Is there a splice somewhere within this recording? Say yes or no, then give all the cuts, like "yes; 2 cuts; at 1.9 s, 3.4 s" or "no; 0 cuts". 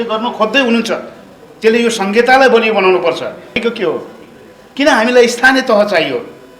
yes; 1 cut; at 3.6 s